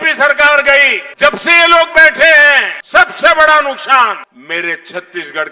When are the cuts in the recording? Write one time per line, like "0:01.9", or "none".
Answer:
0:01.0
0:02.7
0:04.3